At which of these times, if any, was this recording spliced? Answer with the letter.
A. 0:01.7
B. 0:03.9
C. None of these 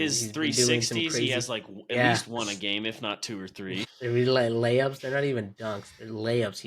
B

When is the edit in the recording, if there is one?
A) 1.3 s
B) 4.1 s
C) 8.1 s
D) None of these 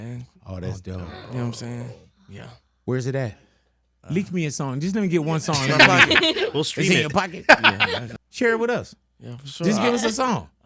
C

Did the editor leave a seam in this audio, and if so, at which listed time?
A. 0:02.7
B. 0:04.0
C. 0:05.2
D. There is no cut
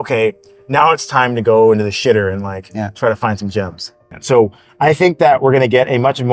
B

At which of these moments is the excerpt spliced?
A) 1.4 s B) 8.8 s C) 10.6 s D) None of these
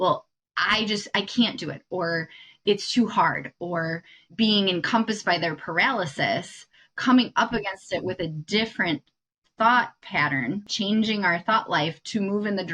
C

